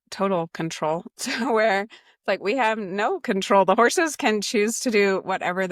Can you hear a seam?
no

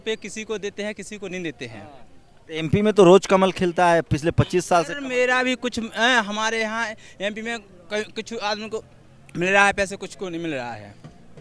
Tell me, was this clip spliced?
no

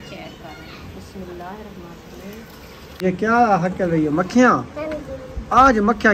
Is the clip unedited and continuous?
no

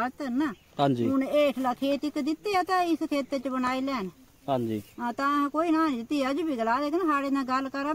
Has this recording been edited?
no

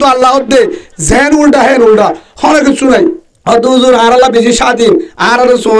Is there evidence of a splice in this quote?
yes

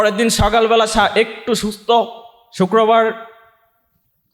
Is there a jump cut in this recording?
no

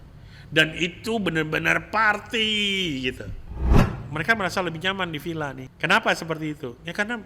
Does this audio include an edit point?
yes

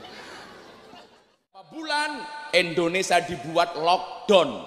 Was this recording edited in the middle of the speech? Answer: yes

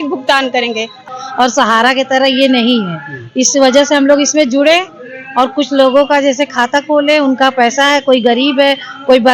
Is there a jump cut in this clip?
yes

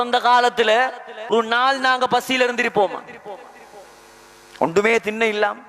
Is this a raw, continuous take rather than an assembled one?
no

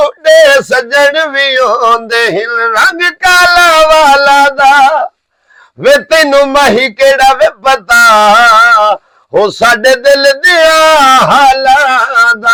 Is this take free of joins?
yes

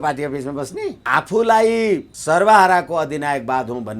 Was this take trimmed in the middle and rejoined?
yes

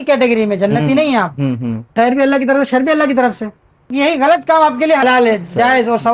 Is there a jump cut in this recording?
yes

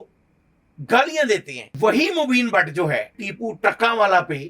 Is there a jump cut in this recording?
yes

